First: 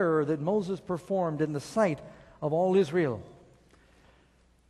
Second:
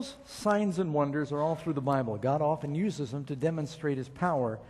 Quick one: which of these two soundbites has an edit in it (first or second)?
second